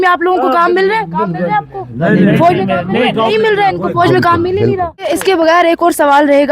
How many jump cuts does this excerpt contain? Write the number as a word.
one